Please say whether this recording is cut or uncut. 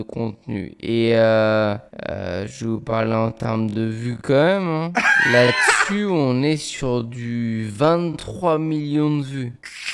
uncut